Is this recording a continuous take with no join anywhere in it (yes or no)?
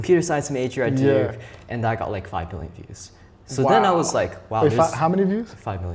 yes